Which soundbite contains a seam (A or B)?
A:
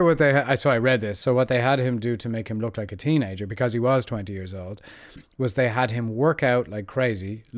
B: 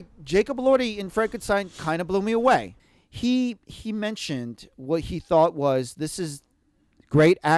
A